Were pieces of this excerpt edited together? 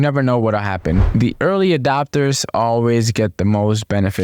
yes; 1 cut; at 1.0 s

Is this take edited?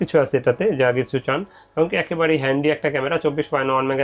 no; 0 cuts

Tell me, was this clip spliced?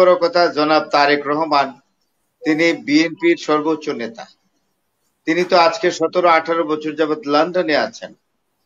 no; 0 cuts

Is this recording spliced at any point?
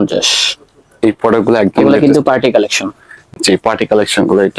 no; 0 cuts

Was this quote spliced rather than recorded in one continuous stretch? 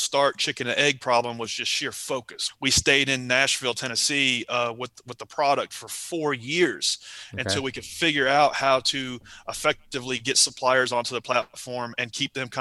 no; 0 cuts

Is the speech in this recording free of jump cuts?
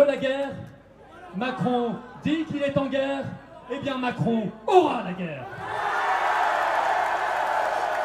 yes; 0 cuts

